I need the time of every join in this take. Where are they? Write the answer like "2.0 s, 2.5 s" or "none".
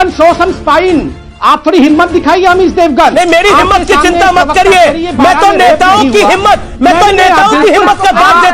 1.2 s